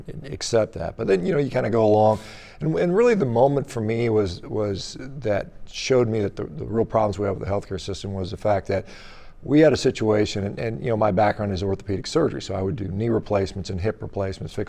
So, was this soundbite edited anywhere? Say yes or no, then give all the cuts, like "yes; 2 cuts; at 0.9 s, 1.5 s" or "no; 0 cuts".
no; 0 cuts